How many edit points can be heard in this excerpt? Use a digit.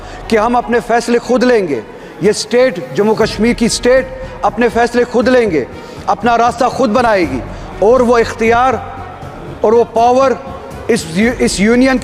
0